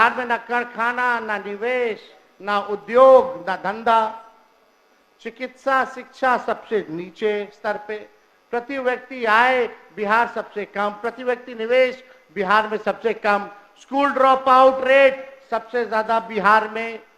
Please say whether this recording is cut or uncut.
uncut